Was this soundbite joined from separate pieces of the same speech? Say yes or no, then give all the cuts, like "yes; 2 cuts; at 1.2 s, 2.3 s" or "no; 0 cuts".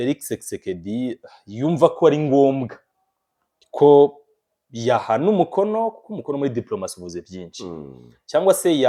no; 0 cuts